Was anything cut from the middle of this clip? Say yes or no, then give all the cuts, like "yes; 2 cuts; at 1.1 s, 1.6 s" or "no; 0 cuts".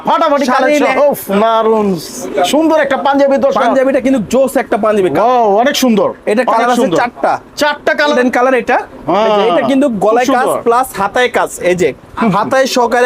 yes; 3 cuts; at 0.9 s, 5.1 s, 8.1 s